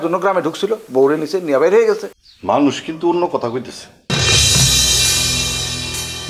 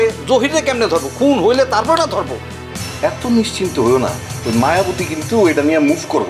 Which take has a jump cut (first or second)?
first